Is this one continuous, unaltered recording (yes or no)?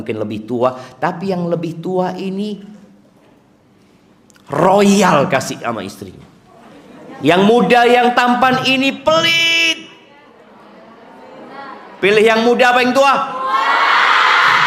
yes